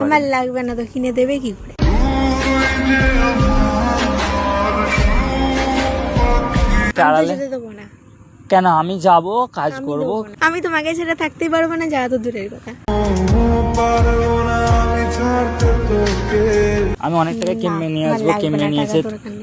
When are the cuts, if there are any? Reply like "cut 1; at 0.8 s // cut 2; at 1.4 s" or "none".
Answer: cut 1; at 6.9 s // cut 2; at 16.9 s